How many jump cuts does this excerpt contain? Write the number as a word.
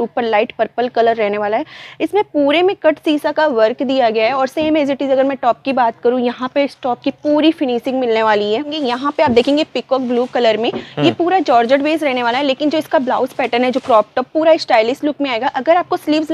one